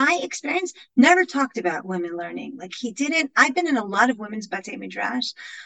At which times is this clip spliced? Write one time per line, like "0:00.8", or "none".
none